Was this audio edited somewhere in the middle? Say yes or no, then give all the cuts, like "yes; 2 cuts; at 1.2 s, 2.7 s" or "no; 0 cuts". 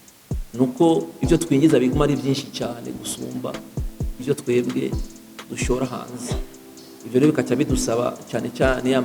no; 0 cuts